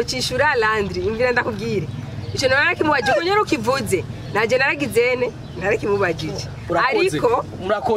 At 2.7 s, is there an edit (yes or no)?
no